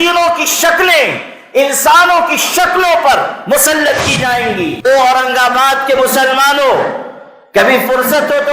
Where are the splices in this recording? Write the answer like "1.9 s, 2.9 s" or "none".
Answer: 4.9 s